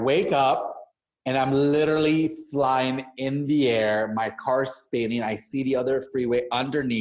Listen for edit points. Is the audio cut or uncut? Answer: uncut